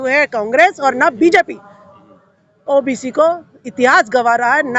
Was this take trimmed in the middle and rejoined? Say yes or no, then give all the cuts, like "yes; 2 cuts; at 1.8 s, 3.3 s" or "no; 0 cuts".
no; 0 cuts